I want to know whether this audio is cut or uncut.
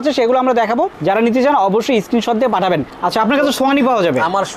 cut